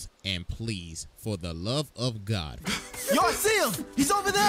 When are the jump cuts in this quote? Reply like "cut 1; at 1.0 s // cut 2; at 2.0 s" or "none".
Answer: cut 1; at 2.9 s